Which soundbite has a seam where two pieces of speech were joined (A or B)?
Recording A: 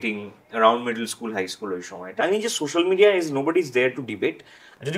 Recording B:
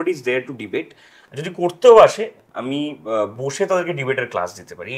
A